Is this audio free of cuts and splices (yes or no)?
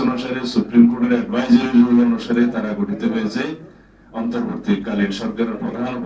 yes